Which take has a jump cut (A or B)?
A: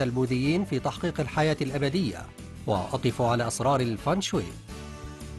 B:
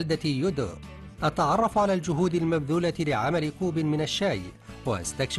A